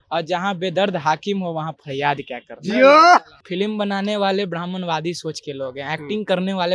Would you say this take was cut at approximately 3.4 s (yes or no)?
yes